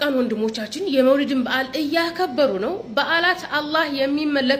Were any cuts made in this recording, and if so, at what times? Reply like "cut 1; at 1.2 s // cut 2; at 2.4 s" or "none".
none